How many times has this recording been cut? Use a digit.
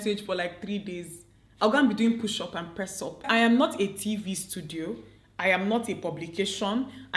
1